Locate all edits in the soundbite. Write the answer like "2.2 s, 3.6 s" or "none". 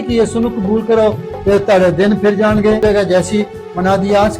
2.8 s